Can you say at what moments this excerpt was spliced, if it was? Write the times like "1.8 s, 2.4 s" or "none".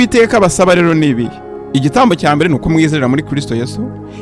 none